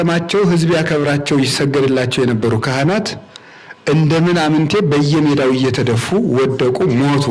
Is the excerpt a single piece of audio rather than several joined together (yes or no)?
yes